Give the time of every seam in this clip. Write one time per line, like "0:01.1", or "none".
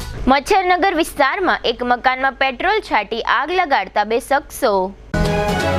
none